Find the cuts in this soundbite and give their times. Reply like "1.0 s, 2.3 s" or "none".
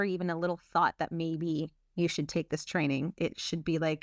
none